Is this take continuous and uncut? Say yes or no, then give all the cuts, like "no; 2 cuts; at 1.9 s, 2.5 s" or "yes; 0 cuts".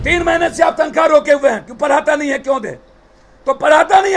yes; 0 cuts